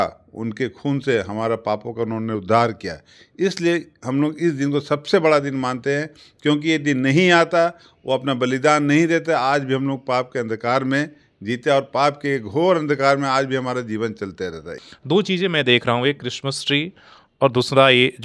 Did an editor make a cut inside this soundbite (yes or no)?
yes